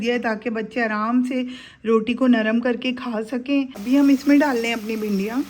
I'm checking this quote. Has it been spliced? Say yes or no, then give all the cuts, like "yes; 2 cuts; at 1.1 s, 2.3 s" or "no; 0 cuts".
yes; 1 cut; at 3.8 s